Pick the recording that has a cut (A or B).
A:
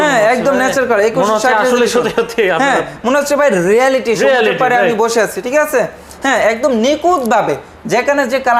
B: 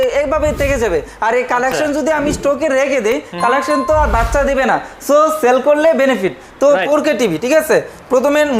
B